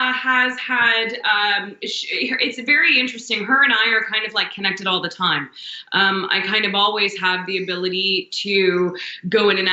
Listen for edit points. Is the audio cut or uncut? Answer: uncut